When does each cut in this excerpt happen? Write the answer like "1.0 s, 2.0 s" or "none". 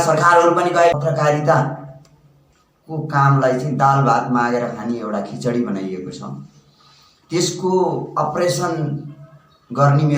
1.0 s